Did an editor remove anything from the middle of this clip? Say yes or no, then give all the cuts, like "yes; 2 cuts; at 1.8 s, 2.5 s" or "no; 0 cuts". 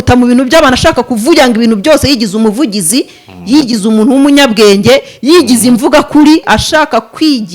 yes; 1 cut; at 6.5 s